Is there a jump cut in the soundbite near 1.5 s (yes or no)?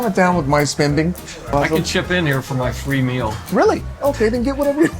yes